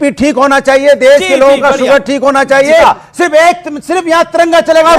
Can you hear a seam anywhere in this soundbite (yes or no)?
yes